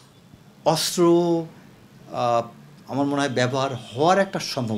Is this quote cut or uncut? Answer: uncut